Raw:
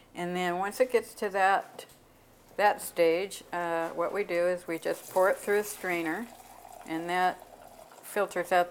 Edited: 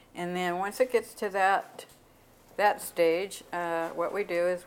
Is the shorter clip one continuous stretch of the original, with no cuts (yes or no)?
yes